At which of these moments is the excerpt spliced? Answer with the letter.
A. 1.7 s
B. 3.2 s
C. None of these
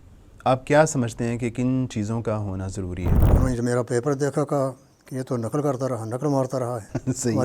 B